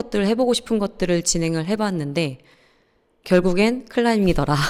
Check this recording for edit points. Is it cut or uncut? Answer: uncut